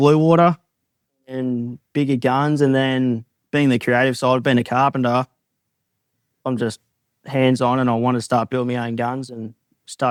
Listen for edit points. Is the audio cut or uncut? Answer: uncut